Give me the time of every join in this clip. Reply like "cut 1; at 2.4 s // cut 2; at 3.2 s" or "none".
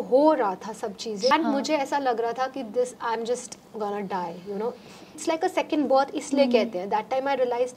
cut 1; at 1.3 s // cut 2; at 5.1 s